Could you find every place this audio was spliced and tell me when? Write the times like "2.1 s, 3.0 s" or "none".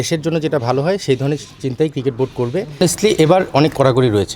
2.8 s